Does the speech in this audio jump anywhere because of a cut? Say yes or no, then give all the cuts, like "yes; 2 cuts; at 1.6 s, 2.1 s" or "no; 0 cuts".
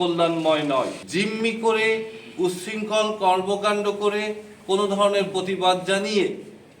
yes; 1 cut; at 1.0 s